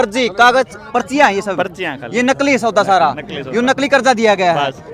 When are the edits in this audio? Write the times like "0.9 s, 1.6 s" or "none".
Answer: none

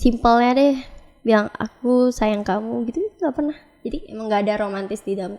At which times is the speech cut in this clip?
none

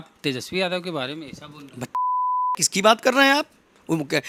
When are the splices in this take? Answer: none

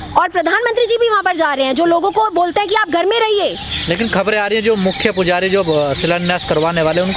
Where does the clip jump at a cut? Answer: none

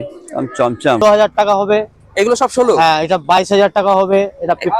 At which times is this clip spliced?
1.0 s

